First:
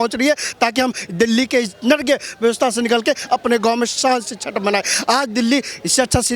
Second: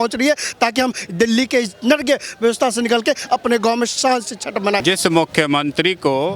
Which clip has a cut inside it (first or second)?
second